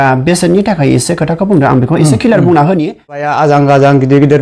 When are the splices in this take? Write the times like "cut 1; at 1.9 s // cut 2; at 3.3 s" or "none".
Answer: cut 1; at 3.3 s